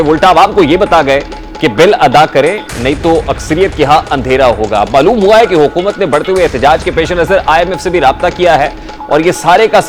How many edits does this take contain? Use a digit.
0